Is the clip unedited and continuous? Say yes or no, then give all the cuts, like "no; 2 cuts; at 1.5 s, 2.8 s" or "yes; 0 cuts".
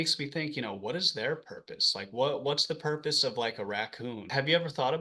yes; 0 cuts